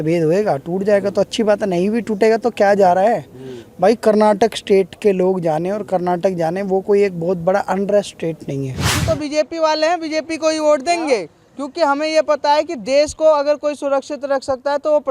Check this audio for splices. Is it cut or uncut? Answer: cut